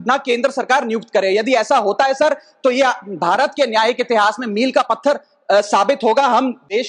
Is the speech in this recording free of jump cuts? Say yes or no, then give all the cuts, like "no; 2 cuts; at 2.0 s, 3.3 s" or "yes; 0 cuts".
yes; 0 cuts